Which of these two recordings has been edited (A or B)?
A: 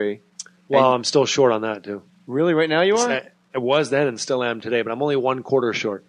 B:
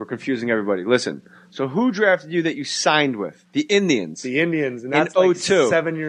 A